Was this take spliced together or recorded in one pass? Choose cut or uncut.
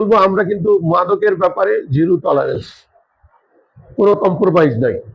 uncut